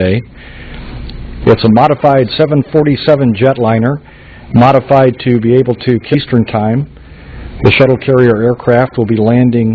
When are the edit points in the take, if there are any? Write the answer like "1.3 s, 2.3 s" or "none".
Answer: none

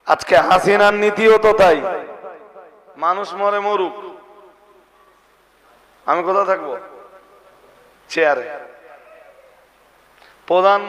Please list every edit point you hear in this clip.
none

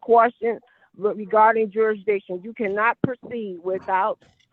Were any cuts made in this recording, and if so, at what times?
none

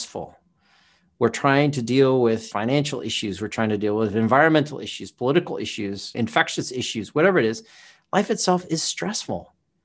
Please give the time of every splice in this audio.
2.5 s, 6.1 s

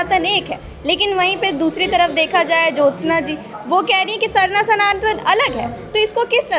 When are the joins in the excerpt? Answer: none

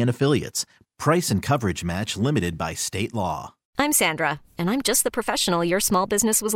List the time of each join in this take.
3.7 s

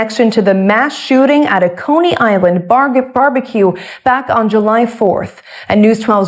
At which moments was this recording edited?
0.9 s, 4.2 s

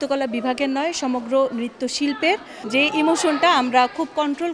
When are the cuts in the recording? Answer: 2.5 s

